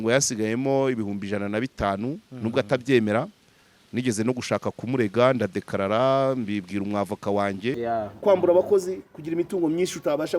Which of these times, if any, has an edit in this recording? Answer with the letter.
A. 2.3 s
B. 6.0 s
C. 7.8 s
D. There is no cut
C